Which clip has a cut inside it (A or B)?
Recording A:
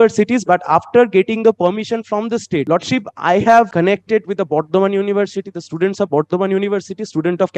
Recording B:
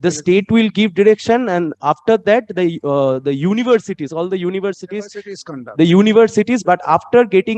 A